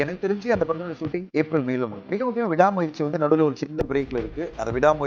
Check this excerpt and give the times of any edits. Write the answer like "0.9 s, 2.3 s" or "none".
1.3 s, 2.0 s